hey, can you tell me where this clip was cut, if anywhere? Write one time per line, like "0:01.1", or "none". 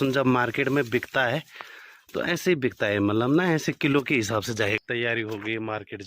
0:04.8